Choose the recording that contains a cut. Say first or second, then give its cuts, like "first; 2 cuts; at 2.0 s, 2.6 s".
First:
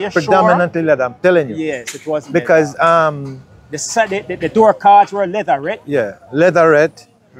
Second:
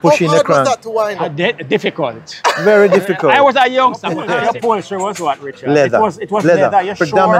second; 1 cut; at 4.2 s